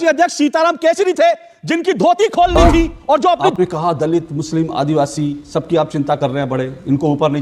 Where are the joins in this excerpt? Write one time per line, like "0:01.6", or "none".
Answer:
0:03.5